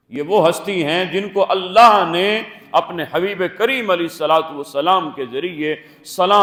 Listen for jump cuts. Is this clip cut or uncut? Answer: uncut